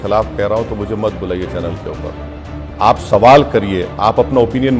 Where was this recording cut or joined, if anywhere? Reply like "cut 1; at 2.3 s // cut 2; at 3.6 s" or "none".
none